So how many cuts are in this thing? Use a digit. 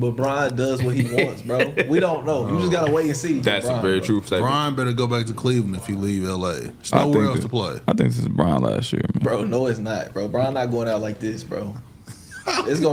0